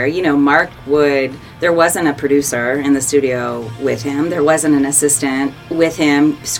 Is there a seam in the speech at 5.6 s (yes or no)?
yes